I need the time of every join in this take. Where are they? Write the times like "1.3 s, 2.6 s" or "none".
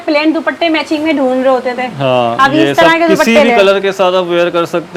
none